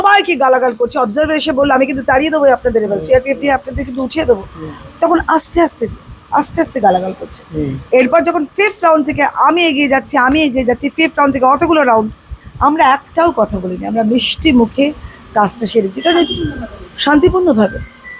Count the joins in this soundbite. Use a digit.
0